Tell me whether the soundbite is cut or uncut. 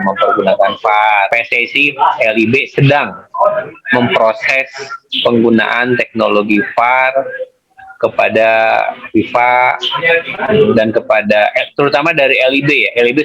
cut